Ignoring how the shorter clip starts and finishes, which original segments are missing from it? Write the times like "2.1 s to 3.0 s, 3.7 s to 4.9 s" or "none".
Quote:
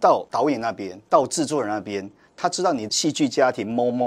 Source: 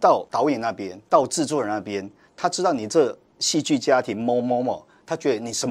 2.8 s to 3.4 s